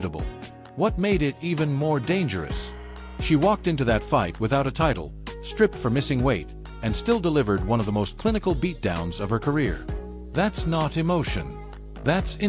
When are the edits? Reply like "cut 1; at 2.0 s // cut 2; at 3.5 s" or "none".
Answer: none

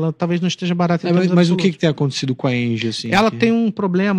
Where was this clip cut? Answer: none

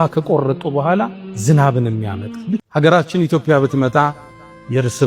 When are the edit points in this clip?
cut 1; at 2.7 s

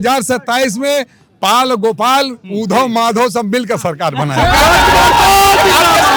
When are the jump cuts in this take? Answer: none

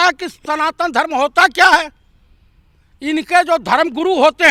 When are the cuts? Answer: none

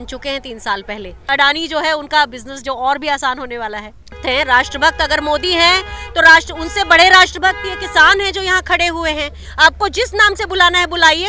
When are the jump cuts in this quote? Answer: cut 1; at 1.3 s // cut 2; at 4.2 s // cut 3; at 9.4 s

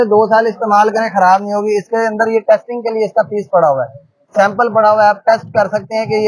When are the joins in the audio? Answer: none

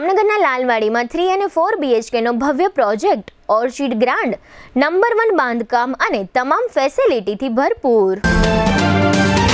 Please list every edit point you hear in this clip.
none

